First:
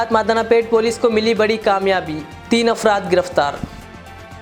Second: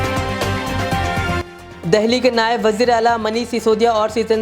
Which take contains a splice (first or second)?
second